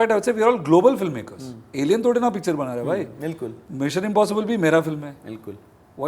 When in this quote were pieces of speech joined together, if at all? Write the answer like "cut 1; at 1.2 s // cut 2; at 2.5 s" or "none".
none